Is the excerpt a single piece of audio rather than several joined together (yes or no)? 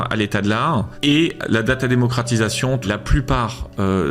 no